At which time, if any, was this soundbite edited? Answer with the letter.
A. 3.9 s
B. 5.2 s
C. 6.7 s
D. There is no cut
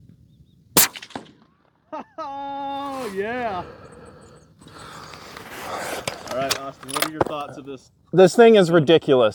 D